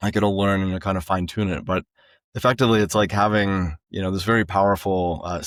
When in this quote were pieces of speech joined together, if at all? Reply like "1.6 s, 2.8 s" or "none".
none